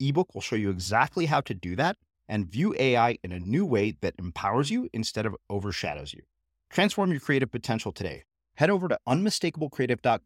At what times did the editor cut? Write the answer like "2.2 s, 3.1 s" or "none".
none

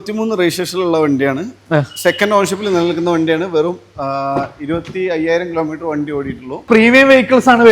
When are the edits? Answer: 6.6 s

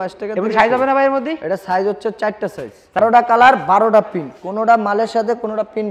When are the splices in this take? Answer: 3.0 s

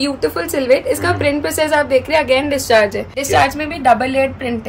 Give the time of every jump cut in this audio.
3.1 s

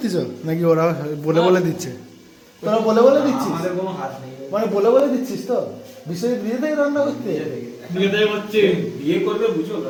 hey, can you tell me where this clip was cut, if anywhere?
none

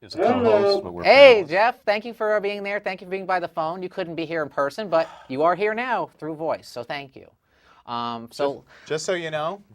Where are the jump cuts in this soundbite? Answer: 5.8 s

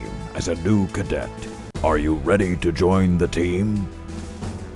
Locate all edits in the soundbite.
3.8 s

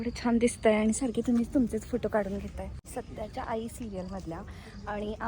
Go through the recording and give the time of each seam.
2.8 s

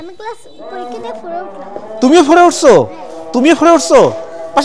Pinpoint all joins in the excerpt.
none

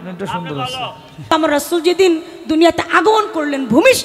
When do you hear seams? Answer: 1.3 s

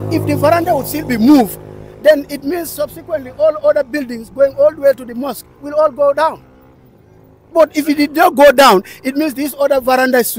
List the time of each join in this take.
none

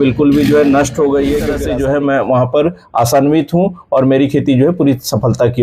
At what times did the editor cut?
1.6 s

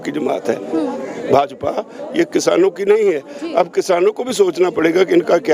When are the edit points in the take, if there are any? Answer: none

